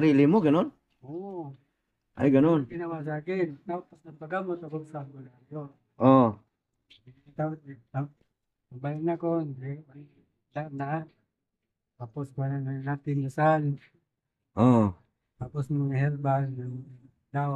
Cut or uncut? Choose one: uncut